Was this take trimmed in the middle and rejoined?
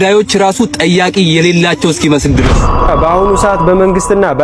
yes; 1 cut; at 2.9 s

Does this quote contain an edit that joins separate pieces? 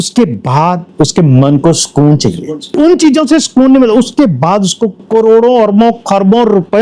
yes; 1 cut; at 2.7 s

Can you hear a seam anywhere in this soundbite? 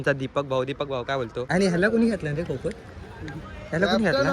yes; 1 cut; at 1.5 s

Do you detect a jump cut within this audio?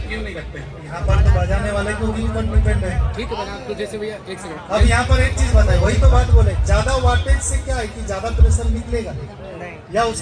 no; 0 cuts

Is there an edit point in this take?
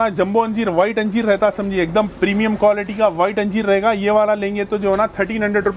no; 0 cuts

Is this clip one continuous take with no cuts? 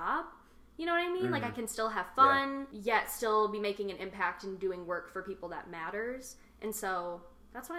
no; 1 cut; at 2.7 s

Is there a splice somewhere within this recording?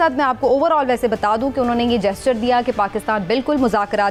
no; 0 cuts

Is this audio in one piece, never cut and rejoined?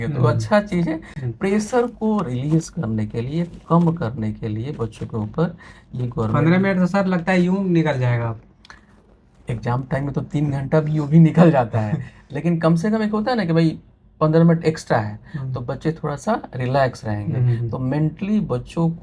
yes; 0 cuts

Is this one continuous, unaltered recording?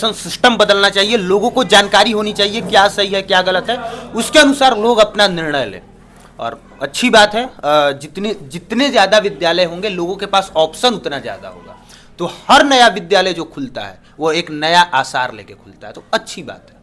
yes; 0 cuts

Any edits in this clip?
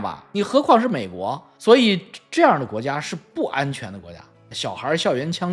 no; 0 cuts

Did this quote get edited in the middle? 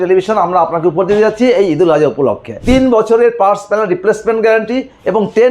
yes; 1 cut; at 2.6 s

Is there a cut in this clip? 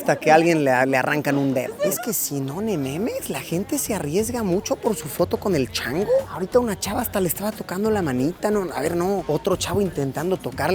no; 0 cuts

